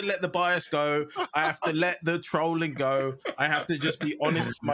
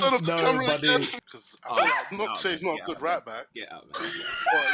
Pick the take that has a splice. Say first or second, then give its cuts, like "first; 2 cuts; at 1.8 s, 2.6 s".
second; 1 cut; at 1.2 s